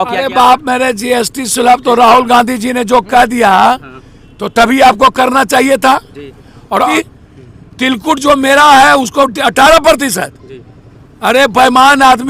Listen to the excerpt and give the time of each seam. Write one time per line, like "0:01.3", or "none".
0:06.9